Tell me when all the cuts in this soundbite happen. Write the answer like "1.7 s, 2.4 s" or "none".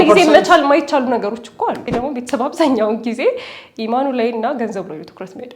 1.9 s